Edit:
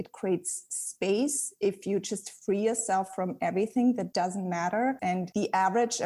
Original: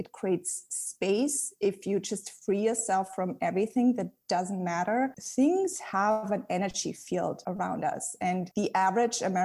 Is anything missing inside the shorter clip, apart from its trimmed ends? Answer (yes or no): yes